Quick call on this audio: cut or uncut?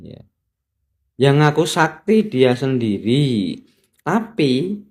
uncut